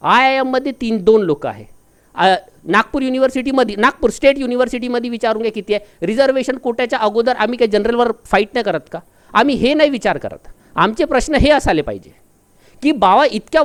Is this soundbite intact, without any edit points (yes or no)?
yes